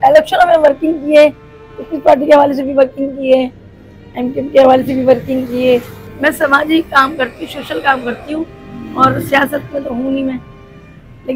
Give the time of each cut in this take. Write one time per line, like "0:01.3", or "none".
0:06.1